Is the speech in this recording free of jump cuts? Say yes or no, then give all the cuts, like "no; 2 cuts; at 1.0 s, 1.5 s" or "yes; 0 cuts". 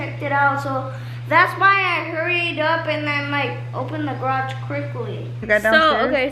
no; 1 cut; at 5.4 s